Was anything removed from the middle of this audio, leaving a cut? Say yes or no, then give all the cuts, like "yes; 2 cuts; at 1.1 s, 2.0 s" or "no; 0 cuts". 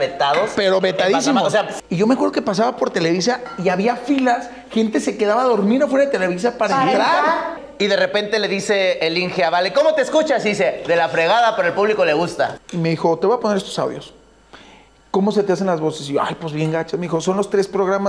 yes; 3 cuts; at 1.7 s, 7.6 s, 12.6 s